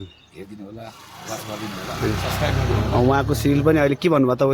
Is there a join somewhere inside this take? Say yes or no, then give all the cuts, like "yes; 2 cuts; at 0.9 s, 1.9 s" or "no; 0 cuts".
no; 0 cuts